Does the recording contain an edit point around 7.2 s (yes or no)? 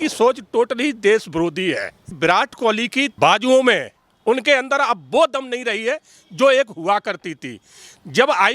no